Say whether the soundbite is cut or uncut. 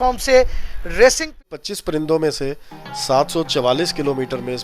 cut